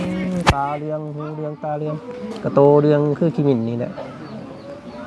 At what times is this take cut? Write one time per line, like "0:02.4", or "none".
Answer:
none